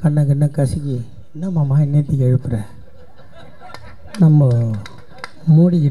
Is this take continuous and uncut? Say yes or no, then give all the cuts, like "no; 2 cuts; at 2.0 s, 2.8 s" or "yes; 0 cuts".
yes; 0 cuts